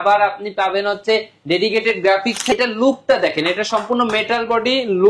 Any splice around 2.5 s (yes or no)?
yes